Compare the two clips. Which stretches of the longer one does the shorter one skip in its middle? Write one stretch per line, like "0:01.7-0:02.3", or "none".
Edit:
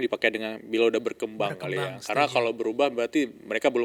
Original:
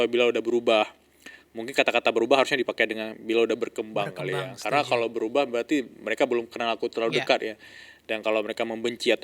none